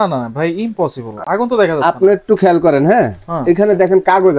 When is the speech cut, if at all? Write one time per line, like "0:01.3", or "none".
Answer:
none